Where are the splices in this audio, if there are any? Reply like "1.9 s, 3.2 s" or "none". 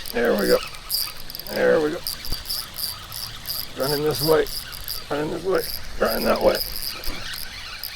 2.3 s